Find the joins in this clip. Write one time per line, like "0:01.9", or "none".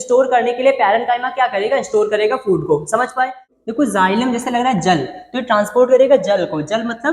0:03.5